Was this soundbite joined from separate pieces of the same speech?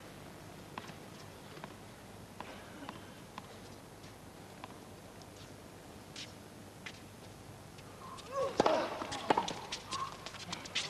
no; 0 cuts

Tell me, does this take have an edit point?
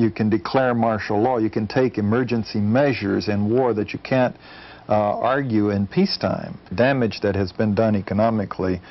yes; 1 cut; at 6.7 s

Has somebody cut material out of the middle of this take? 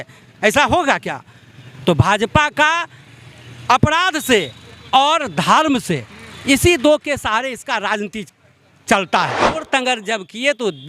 yes; 1 cut; at 9.6 s

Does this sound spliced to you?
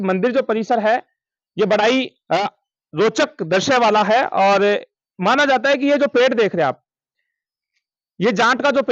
no; 0 cuts

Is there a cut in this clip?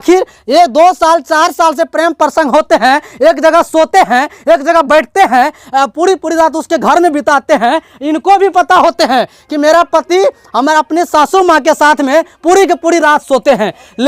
no; 0 cuts

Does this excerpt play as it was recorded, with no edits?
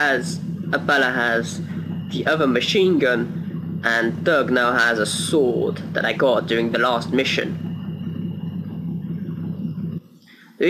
no; 1 cut; at 3.5 s

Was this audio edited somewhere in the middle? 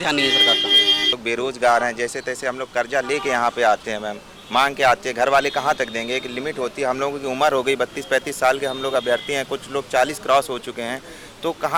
yes; 1 cut; at 1.1 s

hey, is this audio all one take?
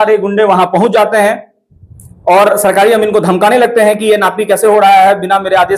yes; 0 cuts

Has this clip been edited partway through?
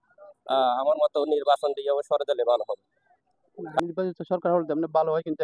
yes; 1 cut; at 3.8 s

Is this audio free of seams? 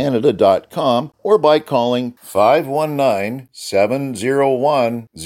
no; 1 cut; at 1.1 s

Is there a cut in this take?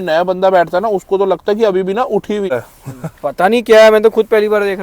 yes; 1 cut; at 2.5 s

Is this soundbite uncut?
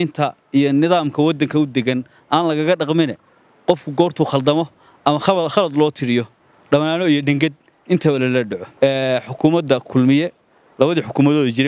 no; 1 cut; at 8.6 s

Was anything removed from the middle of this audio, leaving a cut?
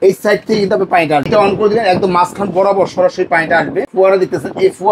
yes; 2 cuts; at 1.3 s, 3.9 s

